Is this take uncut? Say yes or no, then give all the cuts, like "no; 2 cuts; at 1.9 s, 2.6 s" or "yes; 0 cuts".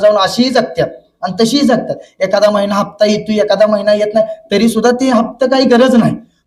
yes; 0 cuts